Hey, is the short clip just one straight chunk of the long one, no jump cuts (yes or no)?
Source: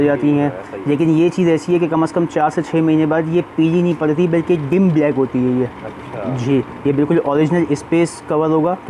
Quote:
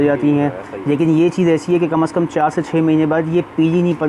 yes